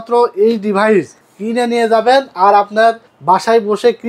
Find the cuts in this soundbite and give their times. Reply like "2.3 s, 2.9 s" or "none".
none